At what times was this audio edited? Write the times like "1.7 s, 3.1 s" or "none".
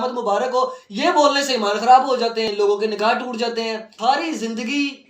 2.5 s, 3.9 s

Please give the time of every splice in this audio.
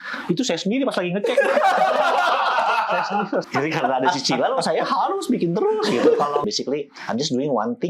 3.4 s, 6.4 s

